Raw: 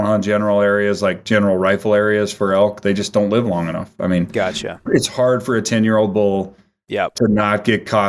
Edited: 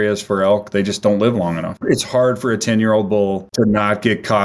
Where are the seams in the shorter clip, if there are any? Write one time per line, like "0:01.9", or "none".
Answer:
0:01.7
0:03.5

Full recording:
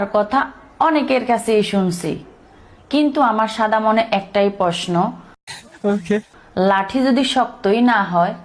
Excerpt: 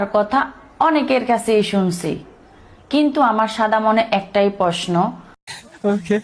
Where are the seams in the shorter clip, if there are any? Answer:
none

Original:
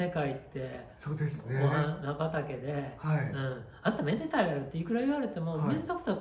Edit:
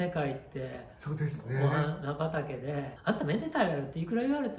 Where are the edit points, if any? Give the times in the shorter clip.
0:02.9

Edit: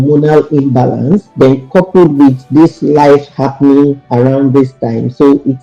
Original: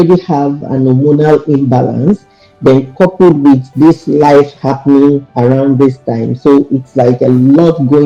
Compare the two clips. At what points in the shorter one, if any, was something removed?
0:01.3

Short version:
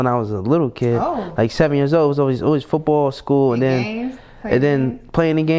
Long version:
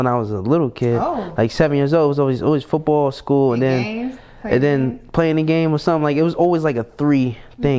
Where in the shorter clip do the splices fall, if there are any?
none

